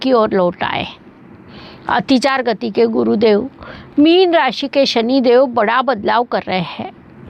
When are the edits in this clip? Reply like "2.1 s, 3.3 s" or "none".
none